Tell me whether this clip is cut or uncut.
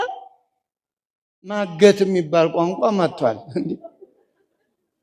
cut